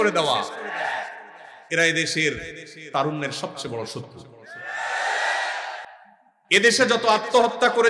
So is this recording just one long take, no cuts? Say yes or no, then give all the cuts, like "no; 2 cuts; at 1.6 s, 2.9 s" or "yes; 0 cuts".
yes; 0 cuts